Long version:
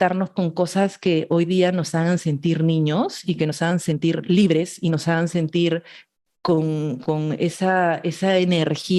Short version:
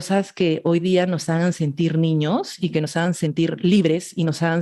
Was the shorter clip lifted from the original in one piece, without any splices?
yes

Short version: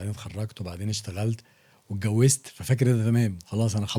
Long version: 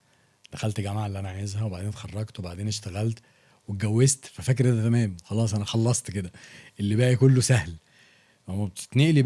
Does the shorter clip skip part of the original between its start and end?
no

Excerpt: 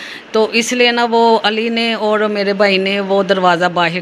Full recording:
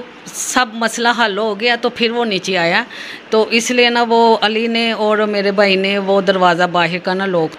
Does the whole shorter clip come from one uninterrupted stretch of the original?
yes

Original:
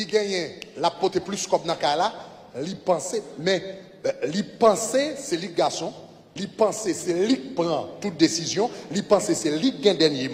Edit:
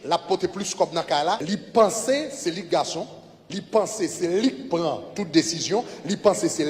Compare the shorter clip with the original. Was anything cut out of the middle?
yes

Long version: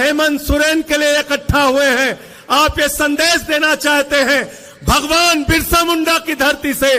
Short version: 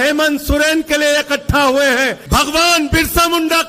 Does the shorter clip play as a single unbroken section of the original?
no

